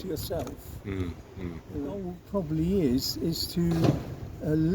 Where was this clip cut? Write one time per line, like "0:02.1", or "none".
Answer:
0:02.2